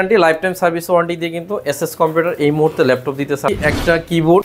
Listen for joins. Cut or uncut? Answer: cut